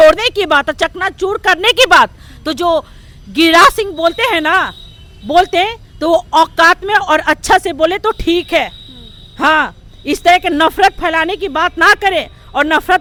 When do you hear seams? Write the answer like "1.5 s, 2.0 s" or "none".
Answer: none

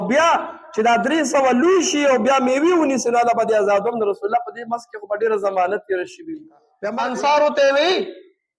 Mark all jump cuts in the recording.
6.8 s

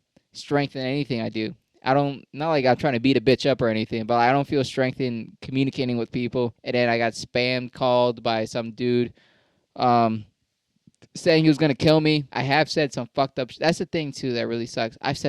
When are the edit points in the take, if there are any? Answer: 6.6 s, 12.3 s

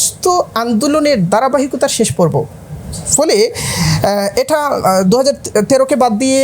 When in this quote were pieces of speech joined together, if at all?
none

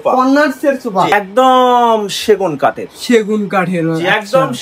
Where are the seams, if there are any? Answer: 1.1 s

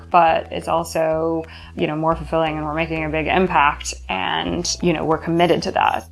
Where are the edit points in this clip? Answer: 1.6 s, 4.7 s

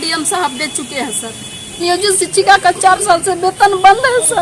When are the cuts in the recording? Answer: 1.8 s

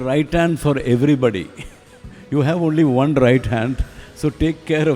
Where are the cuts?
2.1 s

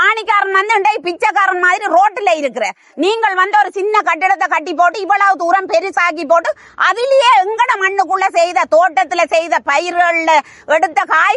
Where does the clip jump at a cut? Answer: none

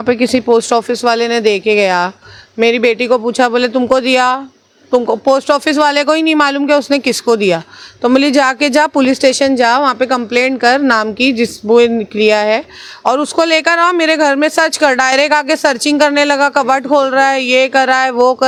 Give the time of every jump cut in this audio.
none

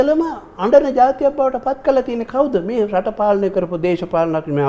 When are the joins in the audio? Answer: none

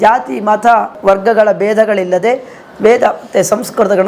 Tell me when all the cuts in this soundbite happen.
0.9 s

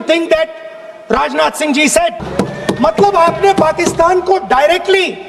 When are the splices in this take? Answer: 2.2 s

